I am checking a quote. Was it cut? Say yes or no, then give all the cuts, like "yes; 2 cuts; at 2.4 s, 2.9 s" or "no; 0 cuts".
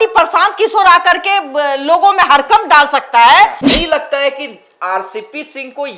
yes; 1 cut; at 3.6 s